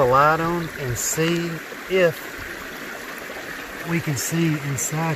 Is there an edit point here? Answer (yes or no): no